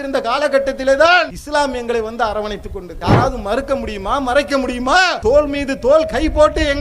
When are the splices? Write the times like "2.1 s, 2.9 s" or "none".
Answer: 1.4 s, 2.9 s, 5.2 s